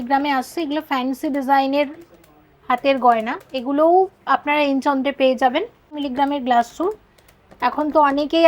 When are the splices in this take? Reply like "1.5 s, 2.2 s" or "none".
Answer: 6.0 s